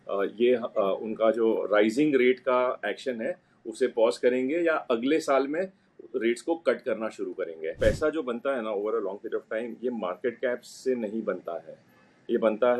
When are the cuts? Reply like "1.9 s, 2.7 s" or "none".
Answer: 7.7 s